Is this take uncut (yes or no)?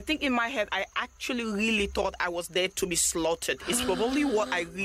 yes